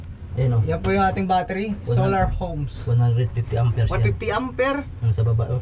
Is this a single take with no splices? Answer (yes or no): yes